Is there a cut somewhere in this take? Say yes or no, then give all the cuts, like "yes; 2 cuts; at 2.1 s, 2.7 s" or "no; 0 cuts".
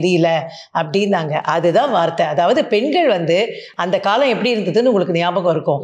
no; 0 cuts